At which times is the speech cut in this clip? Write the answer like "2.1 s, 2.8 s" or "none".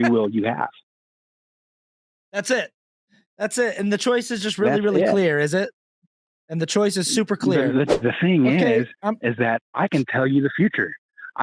7.9 s